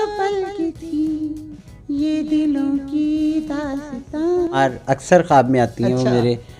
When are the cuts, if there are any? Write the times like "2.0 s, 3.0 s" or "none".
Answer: 4.7 s